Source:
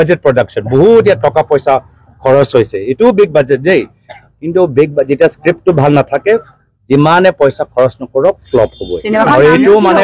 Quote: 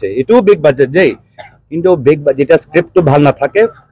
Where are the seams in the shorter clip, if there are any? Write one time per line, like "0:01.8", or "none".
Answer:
none